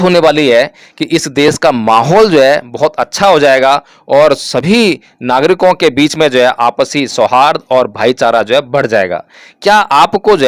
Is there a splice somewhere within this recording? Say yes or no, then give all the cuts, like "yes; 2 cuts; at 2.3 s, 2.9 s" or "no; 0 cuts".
no; 0 cuts